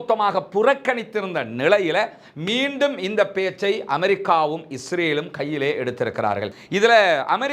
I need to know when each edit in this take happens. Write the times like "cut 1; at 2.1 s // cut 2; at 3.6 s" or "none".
cut 1; at 6.5 s